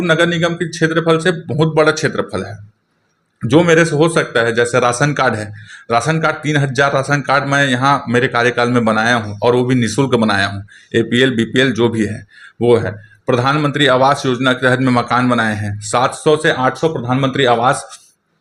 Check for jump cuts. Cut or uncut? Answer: uncut